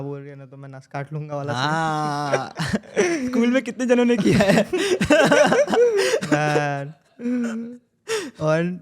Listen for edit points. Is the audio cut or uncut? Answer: uncut